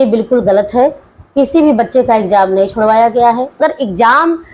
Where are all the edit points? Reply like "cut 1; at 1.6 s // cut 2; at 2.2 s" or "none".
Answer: cut 1; at 3.6 s